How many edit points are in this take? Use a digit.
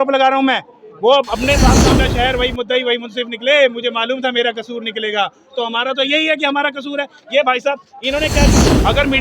2